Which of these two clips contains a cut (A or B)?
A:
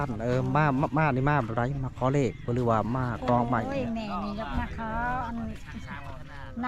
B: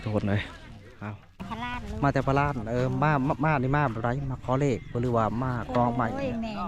B